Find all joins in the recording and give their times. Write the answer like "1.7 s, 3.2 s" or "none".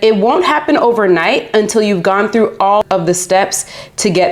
2.8 s